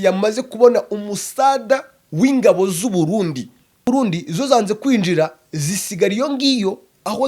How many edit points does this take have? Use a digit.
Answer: 1